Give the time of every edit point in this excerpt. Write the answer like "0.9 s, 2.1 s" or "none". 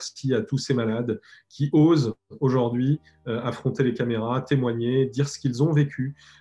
none